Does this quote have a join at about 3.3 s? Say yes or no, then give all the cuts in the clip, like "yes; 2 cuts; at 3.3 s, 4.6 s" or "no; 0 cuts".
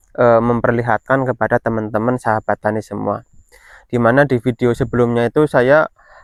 no; 0 cuts